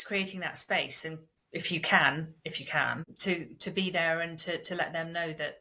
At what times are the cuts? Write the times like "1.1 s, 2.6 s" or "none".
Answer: 1.3 s, 3.1 s